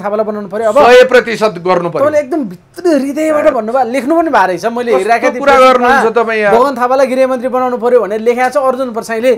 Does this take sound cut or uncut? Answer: uncut